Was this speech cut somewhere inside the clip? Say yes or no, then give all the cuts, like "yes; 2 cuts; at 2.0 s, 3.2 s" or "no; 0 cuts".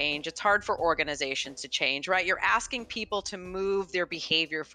no; 0 cuts